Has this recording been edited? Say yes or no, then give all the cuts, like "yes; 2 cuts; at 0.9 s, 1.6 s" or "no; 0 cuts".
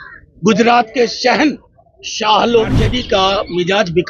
yes; 1 cut; at 2.9 s